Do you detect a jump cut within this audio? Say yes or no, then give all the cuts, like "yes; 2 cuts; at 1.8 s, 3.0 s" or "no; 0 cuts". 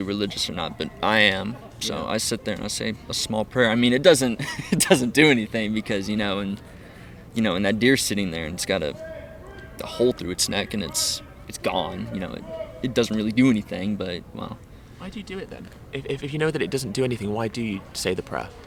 no; 0 cuts